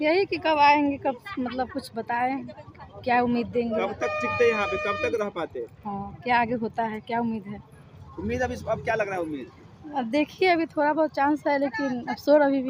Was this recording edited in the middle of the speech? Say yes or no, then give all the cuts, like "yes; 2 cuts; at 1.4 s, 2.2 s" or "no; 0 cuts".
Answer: no; 0 cuts